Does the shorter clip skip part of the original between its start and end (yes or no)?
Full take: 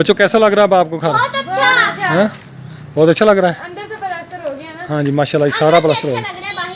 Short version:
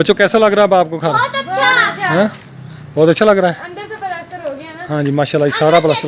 no